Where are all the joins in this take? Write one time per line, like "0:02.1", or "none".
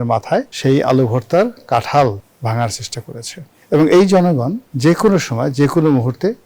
0:04.7